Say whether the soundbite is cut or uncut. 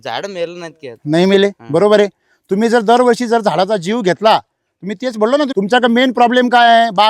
cut